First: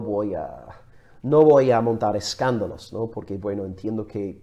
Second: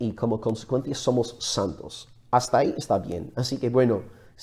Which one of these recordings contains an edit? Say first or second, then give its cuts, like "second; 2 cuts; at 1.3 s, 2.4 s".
second; 1 cut; at 1.1 s